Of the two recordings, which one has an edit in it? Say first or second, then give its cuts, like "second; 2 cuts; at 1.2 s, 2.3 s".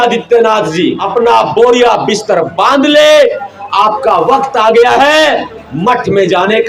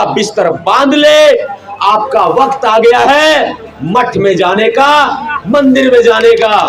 first; 1 cut; at 1.0 s